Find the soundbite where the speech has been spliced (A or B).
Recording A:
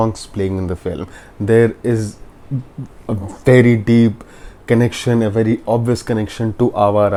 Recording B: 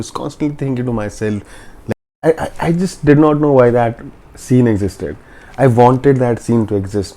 B